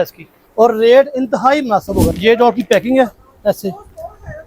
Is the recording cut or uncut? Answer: cut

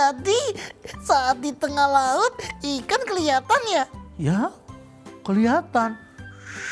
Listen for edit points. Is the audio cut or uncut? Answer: uncut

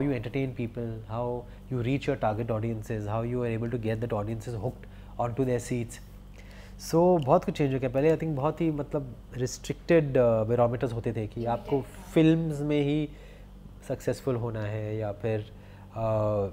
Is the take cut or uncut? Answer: uncut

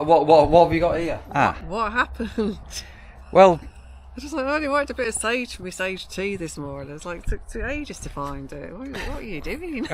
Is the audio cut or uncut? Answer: cut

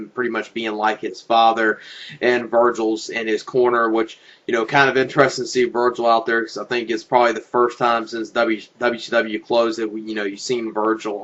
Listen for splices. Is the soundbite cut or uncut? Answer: uncut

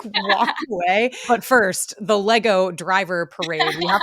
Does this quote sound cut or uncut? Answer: cut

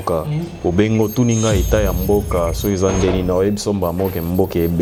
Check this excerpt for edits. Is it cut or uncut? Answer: uncut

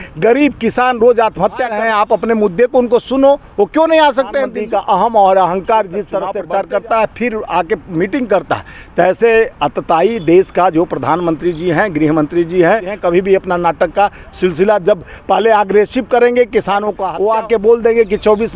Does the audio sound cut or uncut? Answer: cut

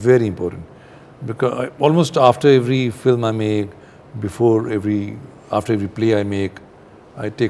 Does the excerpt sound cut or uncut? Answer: uncut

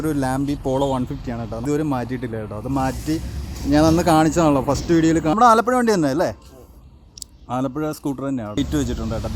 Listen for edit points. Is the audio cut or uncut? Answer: cut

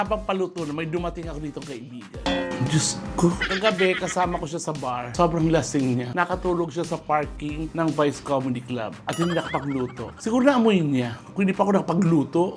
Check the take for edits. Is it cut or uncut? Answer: uncut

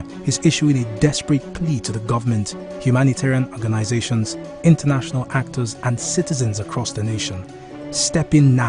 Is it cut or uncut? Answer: cut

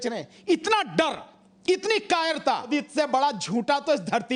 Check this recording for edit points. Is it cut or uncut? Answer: cut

